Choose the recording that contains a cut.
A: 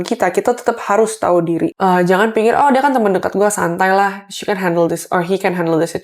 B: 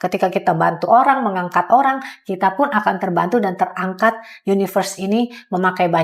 A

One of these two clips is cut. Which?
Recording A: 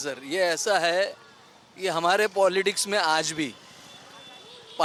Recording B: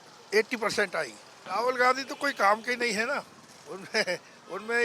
B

